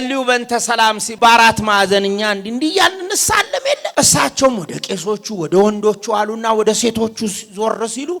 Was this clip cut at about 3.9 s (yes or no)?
yes